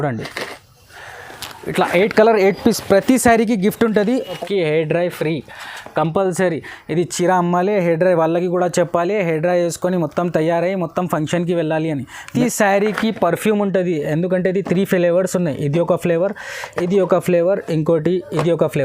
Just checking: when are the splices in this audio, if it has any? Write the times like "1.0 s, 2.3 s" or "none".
4.4 s, 12.3 s